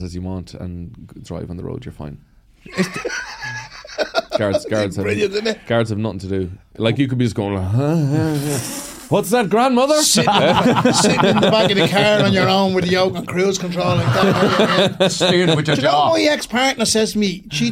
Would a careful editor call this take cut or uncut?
uncut